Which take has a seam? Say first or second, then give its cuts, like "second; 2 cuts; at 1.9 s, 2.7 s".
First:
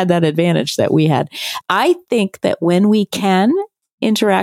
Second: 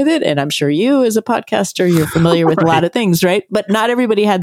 first; 1 cut; at 1.4 s